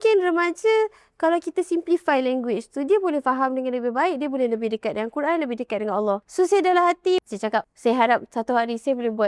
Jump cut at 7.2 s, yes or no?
yes